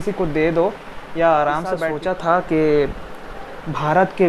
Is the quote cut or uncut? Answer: cut